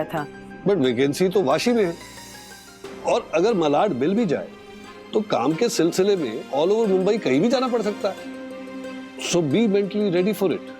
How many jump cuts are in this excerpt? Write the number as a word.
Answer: zero